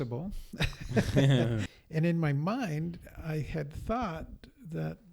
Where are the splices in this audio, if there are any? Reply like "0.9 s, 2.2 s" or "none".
1.8 s